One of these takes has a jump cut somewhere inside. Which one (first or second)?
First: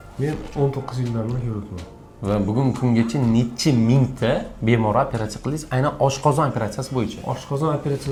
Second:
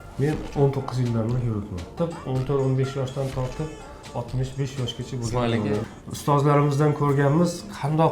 second